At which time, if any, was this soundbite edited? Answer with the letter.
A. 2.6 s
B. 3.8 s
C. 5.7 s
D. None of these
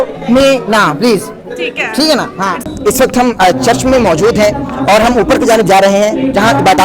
A